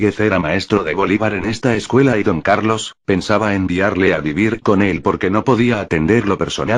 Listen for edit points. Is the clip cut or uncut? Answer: cut